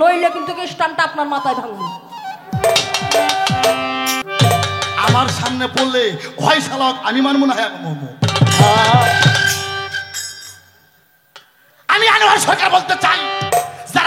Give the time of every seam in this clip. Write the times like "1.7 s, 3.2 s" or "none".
4.2 s